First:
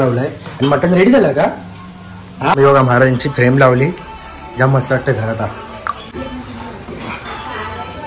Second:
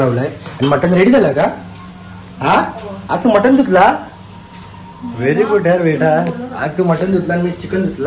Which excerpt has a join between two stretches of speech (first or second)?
first